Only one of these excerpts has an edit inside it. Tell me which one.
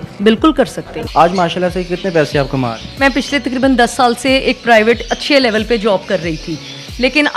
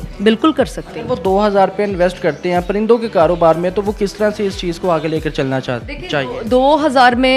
first; 2 cuts; at 1.0 s, 3.0 s

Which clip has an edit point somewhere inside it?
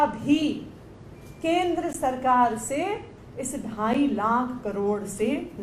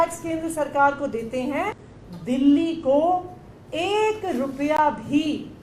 second; 1 cut; at 1.9 s

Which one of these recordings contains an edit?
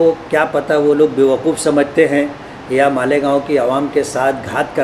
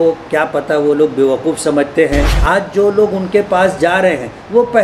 second; 1 cut; at 2.3 s

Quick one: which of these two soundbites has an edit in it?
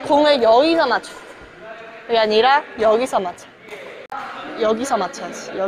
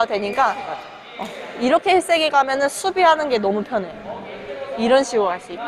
first; 1 cut; at 4.1 s

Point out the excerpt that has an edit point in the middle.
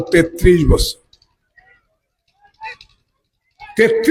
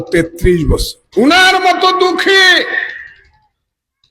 second; 1 cut; at 1.0 s

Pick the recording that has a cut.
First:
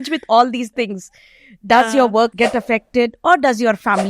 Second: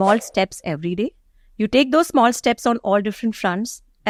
first; 1 cut; at 2.3 s

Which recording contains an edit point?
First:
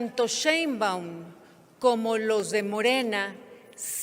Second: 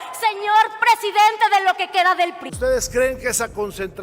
second; 1 cut; at 2.4 s

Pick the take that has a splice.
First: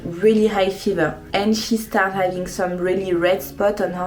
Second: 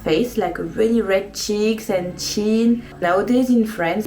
second; 1 cut; at 2.9 s

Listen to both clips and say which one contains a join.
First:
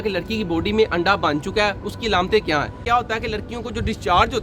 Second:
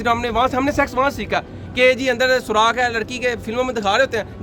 first; 1 cut; at 2.8 s

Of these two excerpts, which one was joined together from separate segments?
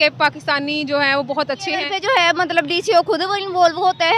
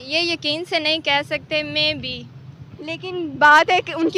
first; 1 cut; at 1.9 s

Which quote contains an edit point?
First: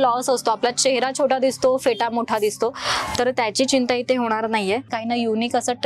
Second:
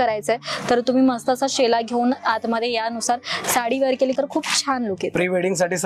first; 1 cut; at 4.9 s

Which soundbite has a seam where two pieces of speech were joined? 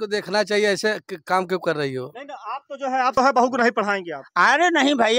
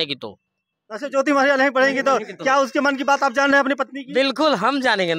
first; 1 cut; at 3.2 s

